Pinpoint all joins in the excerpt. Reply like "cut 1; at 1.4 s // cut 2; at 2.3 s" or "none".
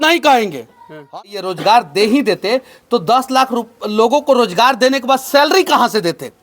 cut 1; at 1.1 s